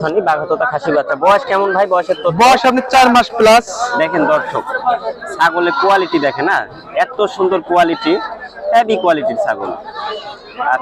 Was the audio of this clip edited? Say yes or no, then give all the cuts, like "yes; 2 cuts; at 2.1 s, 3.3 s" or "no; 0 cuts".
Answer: no; 0 cuts